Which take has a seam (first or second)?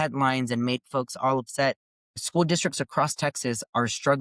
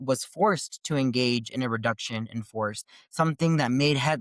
first